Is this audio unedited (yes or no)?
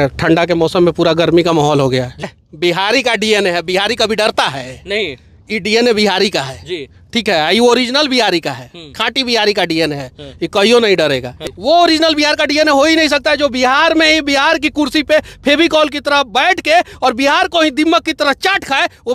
no